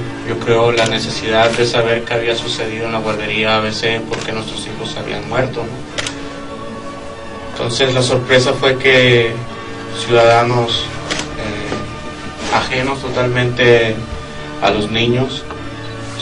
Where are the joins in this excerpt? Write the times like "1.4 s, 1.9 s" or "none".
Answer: 13.5 s